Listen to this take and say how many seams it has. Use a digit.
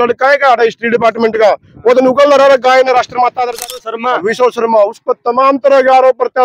1